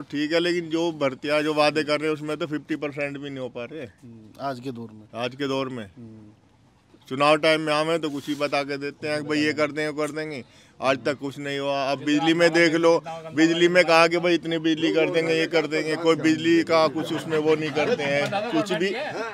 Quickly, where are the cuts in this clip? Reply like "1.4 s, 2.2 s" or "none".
none